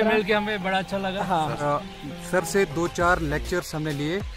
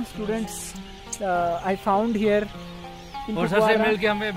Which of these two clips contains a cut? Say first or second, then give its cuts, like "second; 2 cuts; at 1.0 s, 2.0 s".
first; 1 cut; at 1.6 s